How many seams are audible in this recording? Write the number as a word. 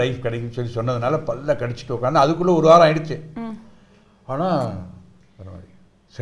zero